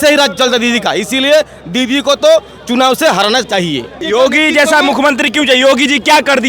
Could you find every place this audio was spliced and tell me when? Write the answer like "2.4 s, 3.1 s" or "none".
4.0 s